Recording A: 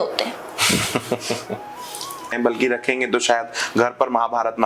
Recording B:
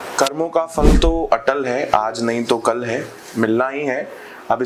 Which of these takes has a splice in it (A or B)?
A